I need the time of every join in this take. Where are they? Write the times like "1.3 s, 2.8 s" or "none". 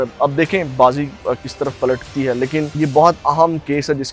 2.8 s